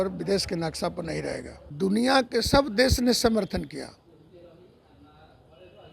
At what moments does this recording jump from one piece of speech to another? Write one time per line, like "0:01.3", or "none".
0:01.6